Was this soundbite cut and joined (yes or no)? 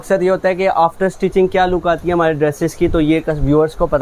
no